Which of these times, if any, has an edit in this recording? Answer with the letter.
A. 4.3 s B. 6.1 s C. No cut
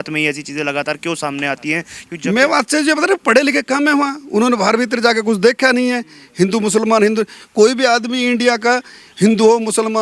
C